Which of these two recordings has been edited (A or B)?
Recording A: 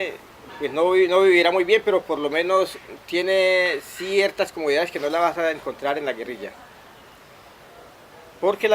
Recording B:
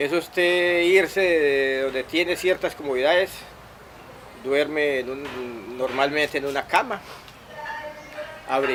A